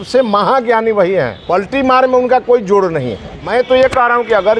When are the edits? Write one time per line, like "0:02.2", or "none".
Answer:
0:01.4
0:03.3